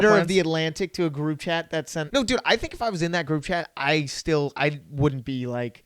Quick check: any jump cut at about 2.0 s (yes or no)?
yes